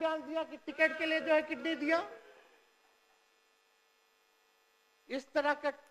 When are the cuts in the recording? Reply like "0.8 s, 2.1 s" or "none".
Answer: none